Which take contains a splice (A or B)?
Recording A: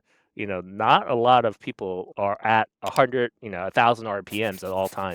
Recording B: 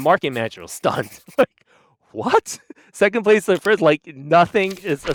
A